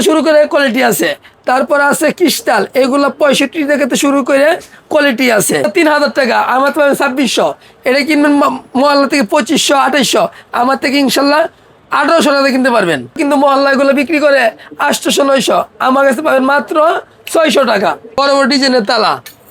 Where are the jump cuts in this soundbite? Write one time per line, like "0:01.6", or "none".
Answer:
0:05.7
0:13.2
0:18.2